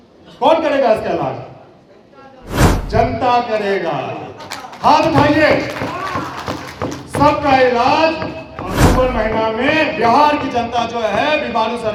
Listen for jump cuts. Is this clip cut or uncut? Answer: uncut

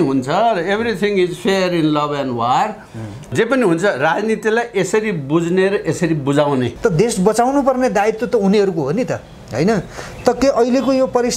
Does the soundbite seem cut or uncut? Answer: cut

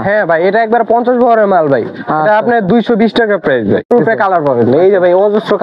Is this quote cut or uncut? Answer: cut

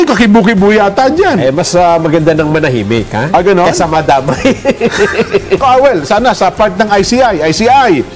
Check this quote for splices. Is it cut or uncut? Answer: cut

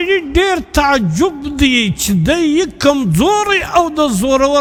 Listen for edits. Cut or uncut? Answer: uncut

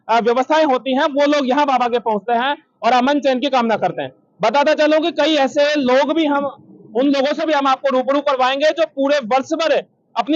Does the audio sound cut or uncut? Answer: uncut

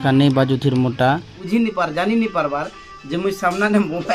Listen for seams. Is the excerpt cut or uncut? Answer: cut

